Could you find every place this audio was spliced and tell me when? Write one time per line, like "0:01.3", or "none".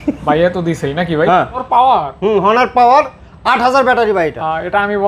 0:01.6

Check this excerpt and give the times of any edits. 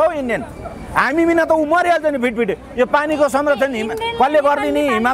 none

